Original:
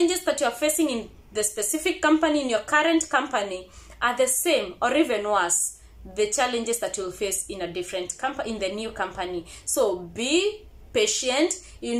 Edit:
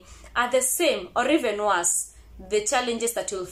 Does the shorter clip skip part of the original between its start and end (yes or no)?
no